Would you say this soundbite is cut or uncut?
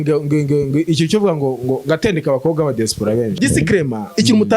cut